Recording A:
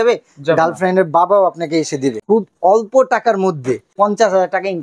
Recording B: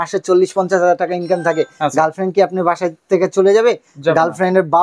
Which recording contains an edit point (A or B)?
A